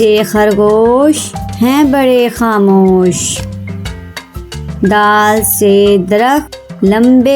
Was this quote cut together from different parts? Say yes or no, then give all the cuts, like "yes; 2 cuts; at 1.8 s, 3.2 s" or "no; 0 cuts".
yes; 2 cuts; at 3.3 s, 4.8 s